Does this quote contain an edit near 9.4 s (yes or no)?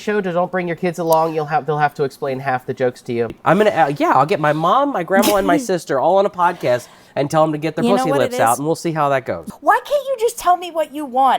yes